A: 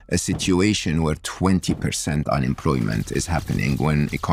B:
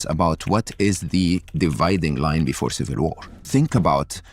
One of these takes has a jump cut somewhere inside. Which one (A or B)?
B